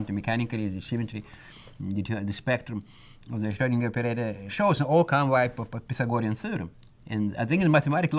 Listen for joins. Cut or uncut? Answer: cut